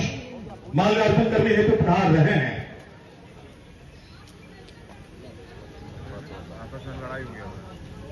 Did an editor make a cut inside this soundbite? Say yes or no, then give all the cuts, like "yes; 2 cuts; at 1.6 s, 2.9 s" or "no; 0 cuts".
no; 0 cuts